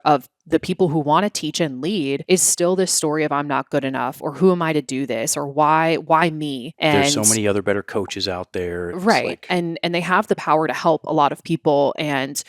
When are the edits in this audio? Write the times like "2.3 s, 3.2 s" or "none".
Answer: 2.2 s